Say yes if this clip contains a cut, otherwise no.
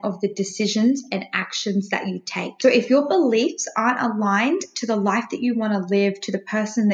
yes